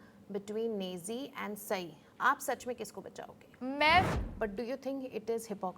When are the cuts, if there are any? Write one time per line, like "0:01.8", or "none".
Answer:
0:04.1